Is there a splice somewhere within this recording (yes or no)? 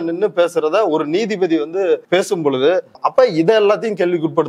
yes